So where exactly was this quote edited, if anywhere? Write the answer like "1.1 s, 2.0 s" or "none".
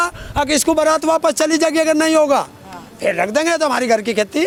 none